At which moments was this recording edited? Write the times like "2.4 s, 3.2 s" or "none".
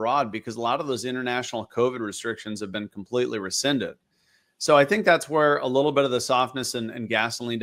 none